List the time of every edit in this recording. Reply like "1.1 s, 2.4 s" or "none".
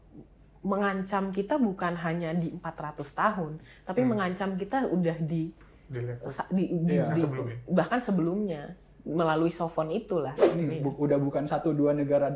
10.4 s